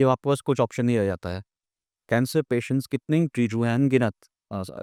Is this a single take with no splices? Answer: yes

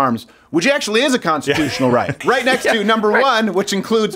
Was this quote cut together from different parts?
yes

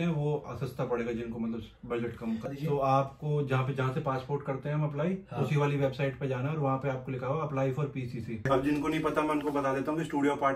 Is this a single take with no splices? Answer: no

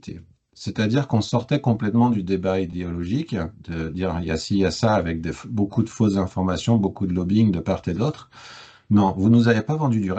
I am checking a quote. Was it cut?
no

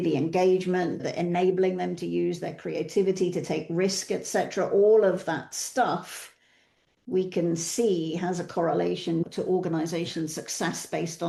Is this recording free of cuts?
yes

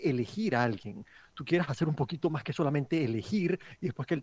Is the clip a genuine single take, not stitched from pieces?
yes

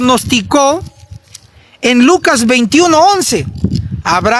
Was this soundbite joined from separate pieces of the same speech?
no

